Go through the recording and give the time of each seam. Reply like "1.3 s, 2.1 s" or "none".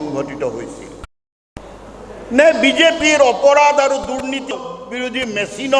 1.5 s, 4.6 s